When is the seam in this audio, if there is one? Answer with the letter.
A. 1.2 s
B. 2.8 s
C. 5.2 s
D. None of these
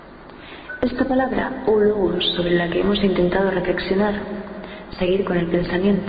C